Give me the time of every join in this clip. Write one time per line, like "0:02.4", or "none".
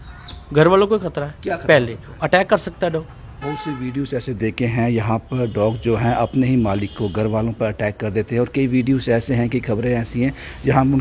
0:03.3